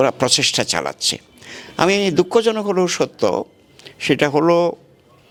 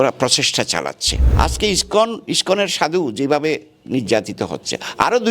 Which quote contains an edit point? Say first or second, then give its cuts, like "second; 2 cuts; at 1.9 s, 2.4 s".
second; 1 cut; at 1.3 s